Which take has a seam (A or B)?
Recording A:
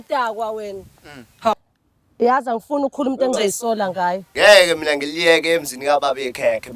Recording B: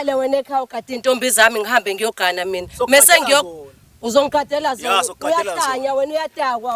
A